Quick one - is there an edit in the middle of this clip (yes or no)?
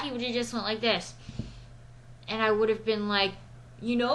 no